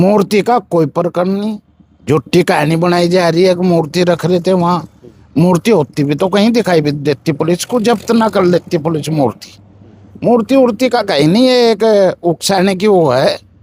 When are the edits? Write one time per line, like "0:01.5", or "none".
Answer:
none